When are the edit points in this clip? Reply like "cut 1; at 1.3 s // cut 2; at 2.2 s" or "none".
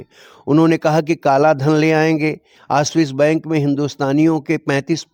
none

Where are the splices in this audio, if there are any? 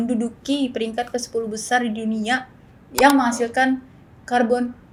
none

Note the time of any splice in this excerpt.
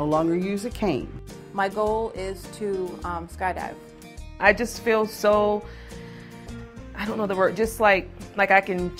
cut 1; at 1.3 s // cut 2; at 4.2 s

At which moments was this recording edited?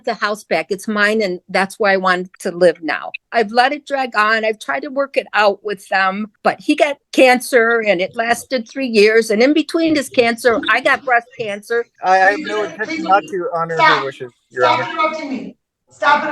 cut 1; at 3.2 s // cut 2; at 6.8 s // cut 3; at 11.9 s

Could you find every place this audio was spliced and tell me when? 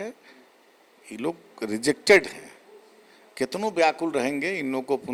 none

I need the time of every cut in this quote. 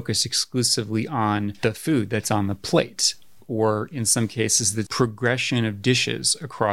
cut 1; at 1.5 s // cut 2; at 4.8 s

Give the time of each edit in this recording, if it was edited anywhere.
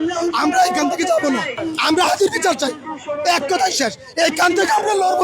cut 1; at 1.6 s

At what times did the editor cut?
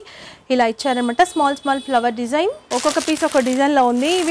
cut 1; at 2.6 s

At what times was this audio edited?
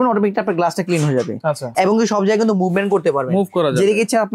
cut 1; at 1.8 s

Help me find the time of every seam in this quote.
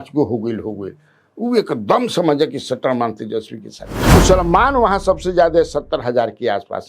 cut 1; at 4.2 s

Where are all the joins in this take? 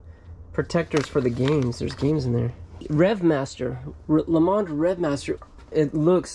cut 1; at 2.7 s // cut 2; at 5.3 s

